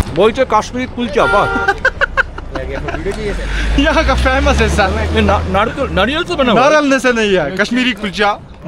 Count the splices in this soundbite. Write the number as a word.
zero